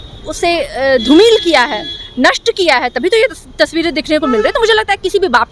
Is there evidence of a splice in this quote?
no; 0 cuts

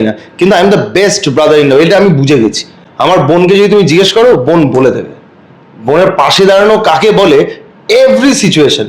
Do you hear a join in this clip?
no; 0 cuts

